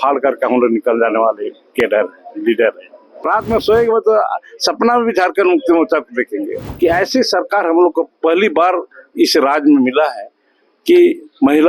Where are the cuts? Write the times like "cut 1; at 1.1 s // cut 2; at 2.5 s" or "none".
cut 1; at 3.1 s // cut 2; at 6.6 s